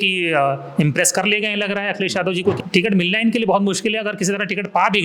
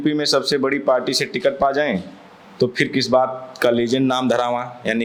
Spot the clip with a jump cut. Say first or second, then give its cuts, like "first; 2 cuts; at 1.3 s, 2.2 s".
first; 1 cut; at 2.6 s